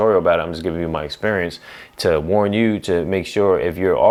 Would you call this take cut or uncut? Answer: uncut